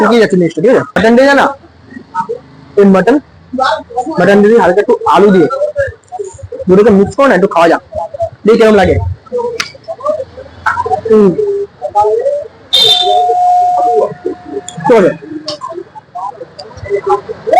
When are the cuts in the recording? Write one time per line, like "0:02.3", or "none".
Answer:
0:01.0